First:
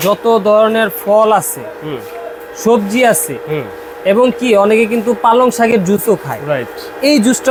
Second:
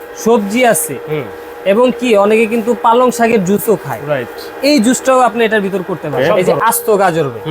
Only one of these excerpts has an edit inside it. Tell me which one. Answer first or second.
second